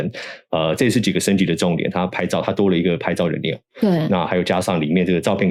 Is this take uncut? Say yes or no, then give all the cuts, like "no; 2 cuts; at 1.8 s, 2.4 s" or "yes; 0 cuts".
yes; 0 cuts